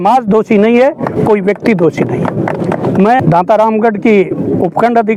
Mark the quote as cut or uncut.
cut